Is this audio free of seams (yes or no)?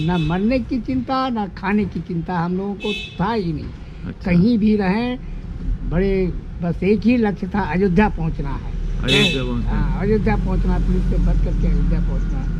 yes